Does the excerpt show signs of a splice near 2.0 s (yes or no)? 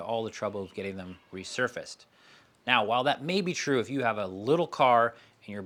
no